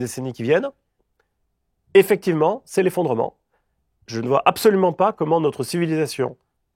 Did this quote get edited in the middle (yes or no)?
no